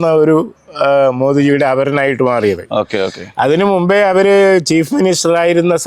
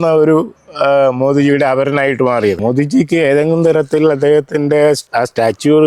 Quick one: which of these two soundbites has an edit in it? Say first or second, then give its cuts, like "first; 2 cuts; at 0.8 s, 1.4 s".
second; 1 cut; at 2.6 s